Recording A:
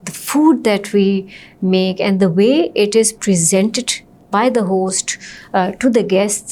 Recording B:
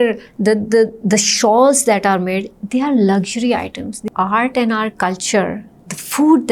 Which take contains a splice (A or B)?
B